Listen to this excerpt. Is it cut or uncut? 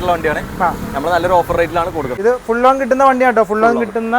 cut